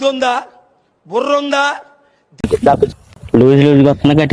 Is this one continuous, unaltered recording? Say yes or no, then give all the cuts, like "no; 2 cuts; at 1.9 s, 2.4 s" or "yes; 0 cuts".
no; 1 cut; at 3.2 s